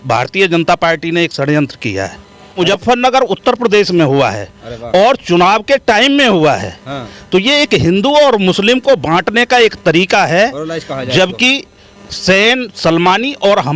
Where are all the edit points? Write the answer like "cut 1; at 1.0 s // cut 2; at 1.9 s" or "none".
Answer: cut 1; at 2.6 s